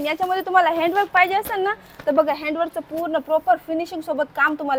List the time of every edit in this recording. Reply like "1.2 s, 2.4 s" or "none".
none